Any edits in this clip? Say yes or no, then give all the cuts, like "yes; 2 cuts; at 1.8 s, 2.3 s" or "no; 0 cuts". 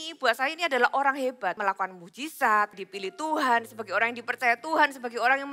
yes; 2 cuts; at 1.6 s, 2.8 s